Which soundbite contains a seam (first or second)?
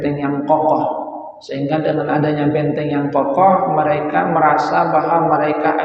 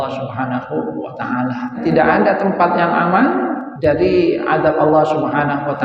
second